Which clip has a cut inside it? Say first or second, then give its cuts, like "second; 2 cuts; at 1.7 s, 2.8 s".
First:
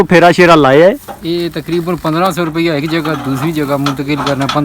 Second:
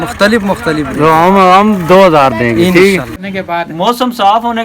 second; 1 cut; at 3.1 s